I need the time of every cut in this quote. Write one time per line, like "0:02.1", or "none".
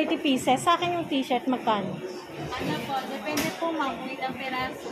0:02.3